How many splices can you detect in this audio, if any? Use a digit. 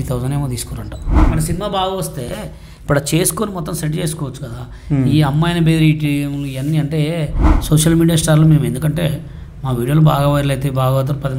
2